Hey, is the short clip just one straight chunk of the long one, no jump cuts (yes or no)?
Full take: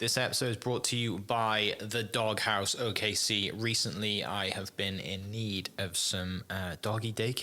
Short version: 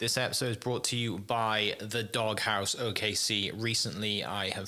yes